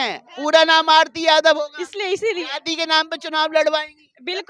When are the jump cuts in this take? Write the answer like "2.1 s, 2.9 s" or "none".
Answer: none